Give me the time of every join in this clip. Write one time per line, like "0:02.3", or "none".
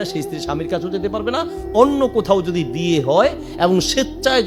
none